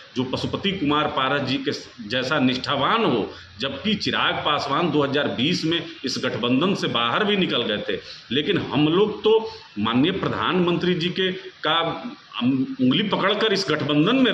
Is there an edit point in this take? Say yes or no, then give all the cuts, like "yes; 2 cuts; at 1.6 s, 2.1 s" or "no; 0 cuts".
no; 0 cuts